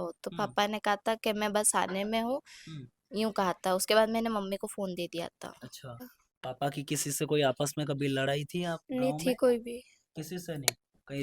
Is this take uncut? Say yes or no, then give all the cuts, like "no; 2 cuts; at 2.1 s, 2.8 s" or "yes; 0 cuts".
no; 1 cut; at 6.1 s